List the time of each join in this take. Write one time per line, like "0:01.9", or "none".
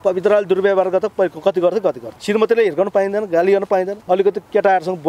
0:02.1
0:04.0